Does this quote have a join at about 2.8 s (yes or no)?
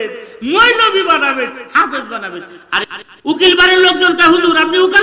yes